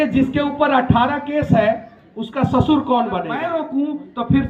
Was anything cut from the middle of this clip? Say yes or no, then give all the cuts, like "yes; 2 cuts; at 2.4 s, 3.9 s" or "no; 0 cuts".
yes; 1 cut; at 3.5 s